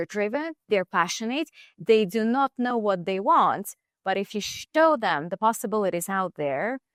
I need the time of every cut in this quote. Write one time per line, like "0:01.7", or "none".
none